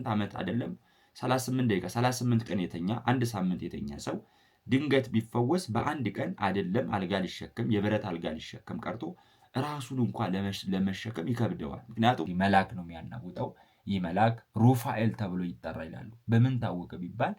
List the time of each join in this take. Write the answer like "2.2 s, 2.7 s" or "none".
12.3 s